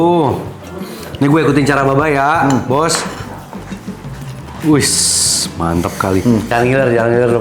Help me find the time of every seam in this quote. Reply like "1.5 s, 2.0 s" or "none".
6.5 s